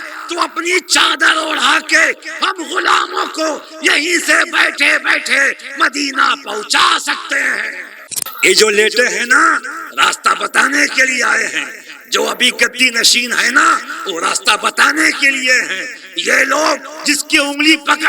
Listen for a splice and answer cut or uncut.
cut